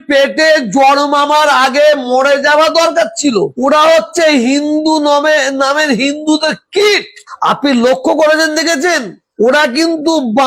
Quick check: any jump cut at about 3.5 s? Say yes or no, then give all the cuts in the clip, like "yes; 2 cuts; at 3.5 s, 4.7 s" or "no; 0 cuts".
no; 0 cuts